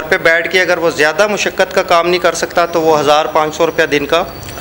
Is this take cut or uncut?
uncut